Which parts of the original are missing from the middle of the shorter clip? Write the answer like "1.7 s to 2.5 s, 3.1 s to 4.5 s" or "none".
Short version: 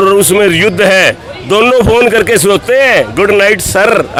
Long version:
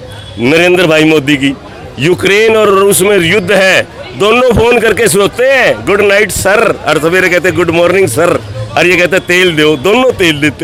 none